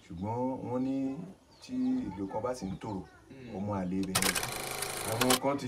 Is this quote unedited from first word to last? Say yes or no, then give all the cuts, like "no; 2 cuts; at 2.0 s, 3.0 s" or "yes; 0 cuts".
no; 1 cut; at 4.4 s